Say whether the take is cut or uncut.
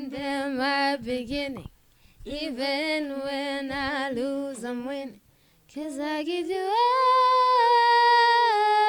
uncut